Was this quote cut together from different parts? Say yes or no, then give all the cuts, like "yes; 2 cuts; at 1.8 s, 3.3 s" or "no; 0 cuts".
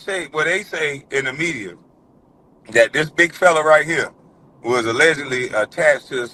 no; 0 cuts